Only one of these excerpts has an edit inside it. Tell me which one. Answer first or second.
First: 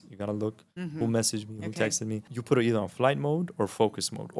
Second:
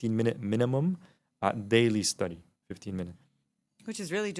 first